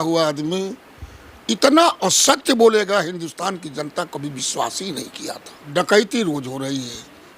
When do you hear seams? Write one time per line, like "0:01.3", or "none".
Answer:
0:05.5